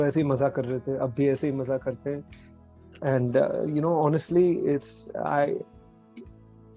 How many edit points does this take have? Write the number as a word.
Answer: zero